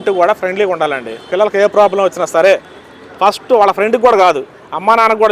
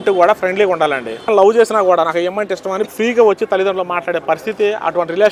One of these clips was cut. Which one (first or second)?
second